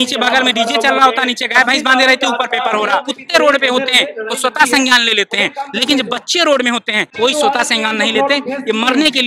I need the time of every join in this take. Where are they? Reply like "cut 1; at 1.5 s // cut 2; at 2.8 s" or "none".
cut 1; at 3.2 s // cut 2; at 7.1 s